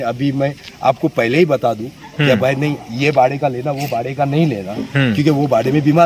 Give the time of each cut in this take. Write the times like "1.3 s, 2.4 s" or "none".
none